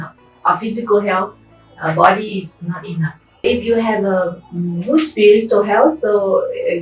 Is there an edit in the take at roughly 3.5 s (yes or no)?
yes